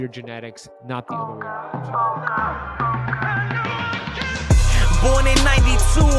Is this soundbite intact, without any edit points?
no; 1 cut; at 1.1 s

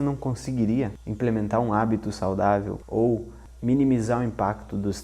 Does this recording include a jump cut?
yes; 3 cuts; at 1.0 s, 2.8 s, 3.4 s

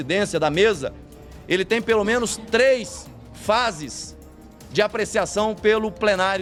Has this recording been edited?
no; 0 cuts

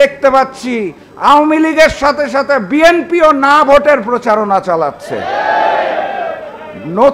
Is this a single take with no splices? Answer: yes; 0 cuts

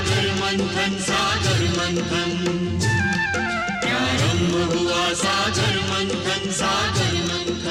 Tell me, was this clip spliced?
no; 0 cuts

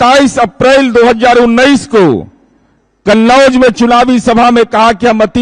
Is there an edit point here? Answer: no; 0 cuts

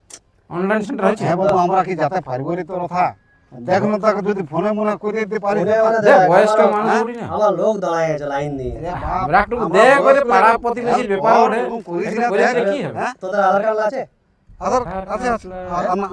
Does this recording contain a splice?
no; 0 cuts

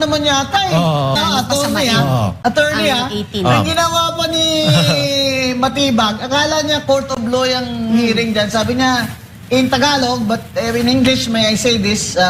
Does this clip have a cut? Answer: yes; 1 cut; at 1.1 s

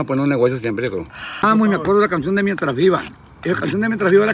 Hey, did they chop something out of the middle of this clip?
yes; 1 cut; at 1.4 s

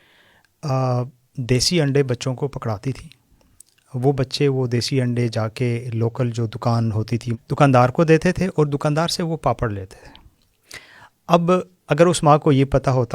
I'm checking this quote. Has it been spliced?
yes; 1 cut; at 7.3 s

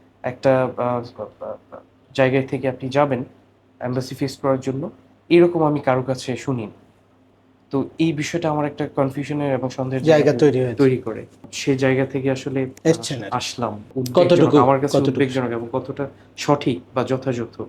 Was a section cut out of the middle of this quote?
yes; 3 cuts; at 11.5 s, 12.7 s, 13.8 s

